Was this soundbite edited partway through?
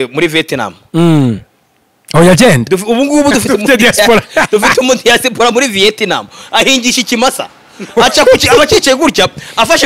no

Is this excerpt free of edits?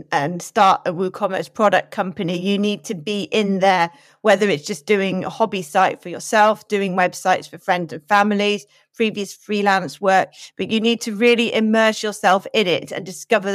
yes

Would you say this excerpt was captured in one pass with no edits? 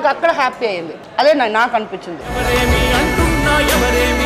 no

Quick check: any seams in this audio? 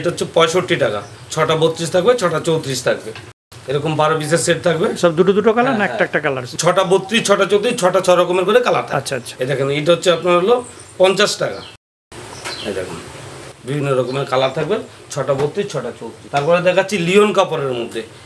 no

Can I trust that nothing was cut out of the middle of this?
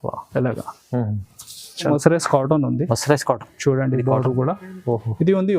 no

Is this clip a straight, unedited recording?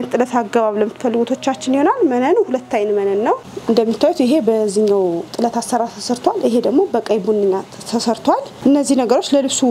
no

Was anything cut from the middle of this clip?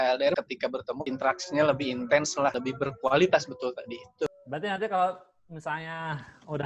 yes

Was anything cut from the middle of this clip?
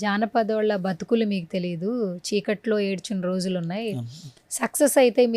no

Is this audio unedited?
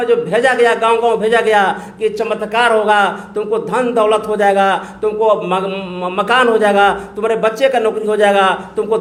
yes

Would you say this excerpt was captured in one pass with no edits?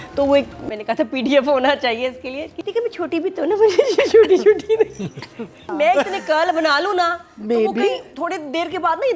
no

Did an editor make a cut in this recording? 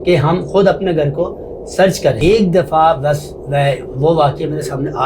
yes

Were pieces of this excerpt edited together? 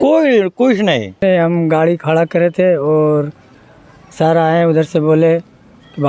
yes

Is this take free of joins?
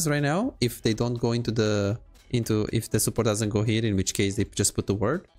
yes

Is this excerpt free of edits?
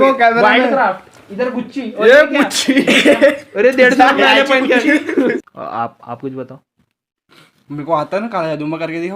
no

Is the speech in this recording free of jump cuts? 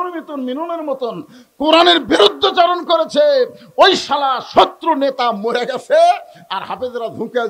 yes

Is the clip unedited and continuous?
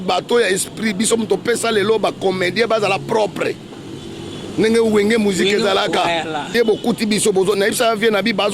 no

